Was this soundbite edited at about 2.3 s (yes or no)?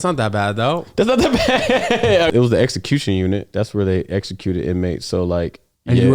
yes